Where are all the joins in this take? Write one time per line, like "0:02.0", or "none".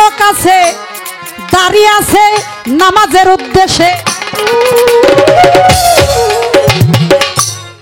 none

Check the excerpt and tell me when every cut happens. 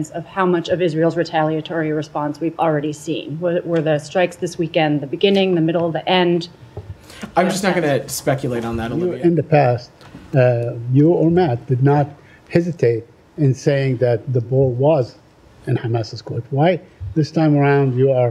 0:09.0

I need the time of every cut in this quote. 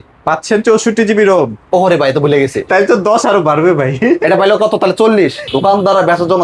0:05.4

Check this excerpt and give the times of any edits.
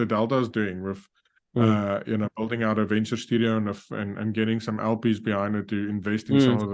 none

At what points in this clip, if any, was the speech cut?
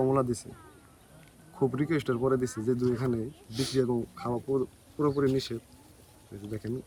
none

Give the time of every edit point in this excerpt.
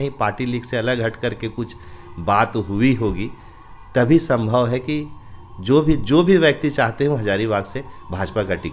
none

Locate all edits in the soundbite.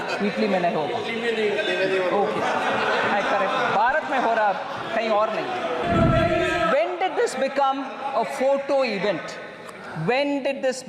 0:05.8

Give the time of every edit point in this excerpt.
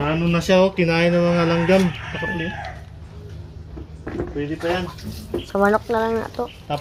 none

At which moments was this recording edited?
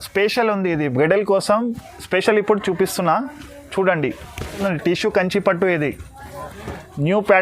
0:04.6

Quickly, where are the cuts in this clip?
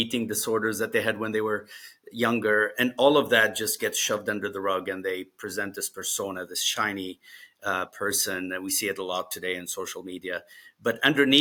none

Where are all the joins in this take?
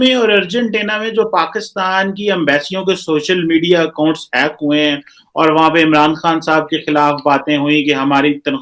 none

